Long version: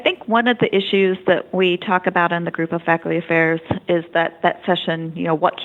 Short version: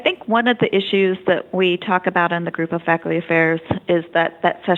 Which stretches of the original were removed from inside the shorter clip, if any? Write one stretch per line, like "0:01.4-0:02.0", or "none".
none